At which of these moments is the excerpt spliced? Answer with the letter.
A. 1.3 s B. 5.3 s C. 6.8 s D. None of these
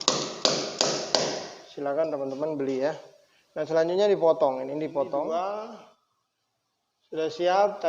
B